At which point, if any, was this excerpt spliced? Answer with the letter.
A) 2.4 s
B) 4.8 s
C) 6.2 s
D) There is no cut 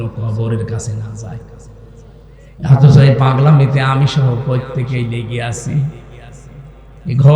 A